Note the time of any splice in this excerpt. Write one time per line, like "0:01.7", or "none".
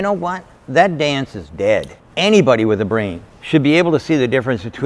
0:02.0
0:03.3